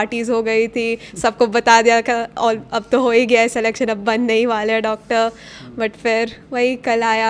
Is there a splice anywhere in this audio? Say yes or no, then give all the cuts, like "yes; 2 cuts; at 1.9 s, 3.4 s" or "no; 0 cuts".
no; 0 cuts